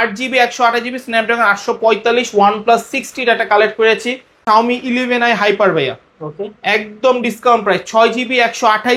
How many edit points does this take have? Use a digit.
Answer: 1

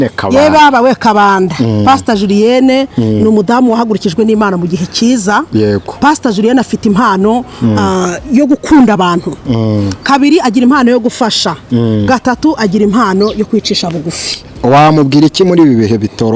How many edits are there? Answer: 0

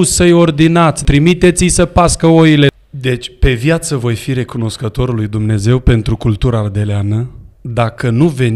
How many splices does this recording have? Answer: 2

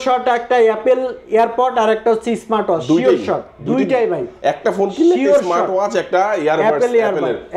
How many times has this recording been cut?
0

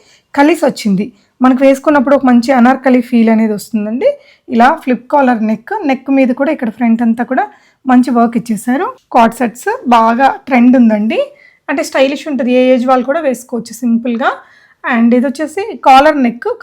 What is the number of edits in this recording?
1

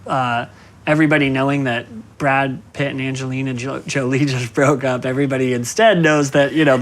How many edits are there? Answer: 2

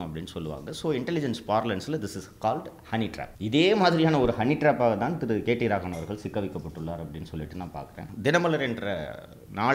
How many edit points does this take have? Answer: 2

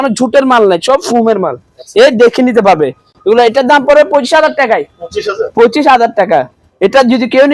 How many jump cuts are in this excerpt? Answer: 0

